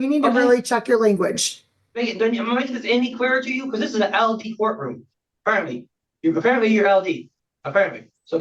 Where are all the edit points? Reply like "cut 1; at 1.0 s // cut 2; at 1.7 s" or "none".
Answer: cut 1; at 2.0 s